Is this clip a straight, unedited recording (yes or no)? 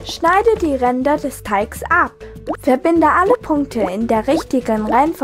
yes